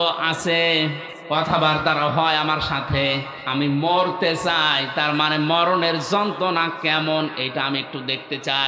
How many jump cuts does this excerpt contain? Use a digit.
1